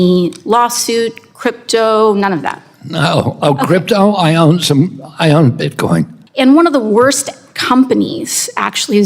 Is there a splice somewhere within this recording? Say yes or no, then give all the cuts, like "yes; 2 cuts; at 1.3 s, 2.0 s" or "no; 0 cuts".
yes; 1 cut; at 6.2 s